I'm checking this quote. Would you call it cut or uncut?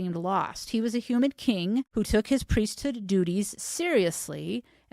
cut